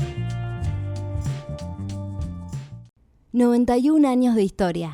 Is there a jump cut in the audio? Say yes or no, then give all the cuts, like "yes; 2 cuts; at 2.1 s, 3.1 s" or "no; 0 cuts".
yes; 1 cut; at 2.9 s